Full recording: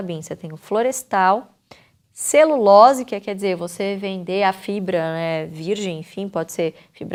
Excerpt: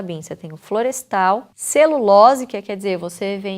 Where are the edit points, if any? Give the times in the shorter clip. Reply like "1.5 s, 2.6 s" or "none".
1.6 s